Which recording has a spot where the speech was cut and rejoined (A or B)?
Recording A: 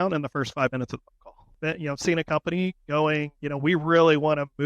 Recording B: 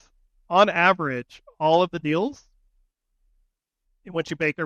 A